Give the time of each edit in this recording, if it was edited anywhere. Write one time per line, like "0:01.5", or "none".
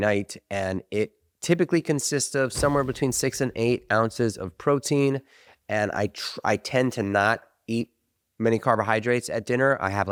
none